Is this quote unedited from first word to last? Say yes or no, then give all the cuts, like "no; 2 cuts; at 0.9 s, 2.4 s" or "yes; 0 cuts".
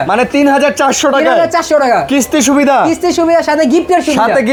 yes; 0 cuts